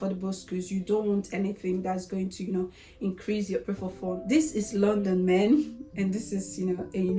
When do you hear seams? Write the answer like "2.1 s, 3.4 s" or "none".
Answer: 4.2 s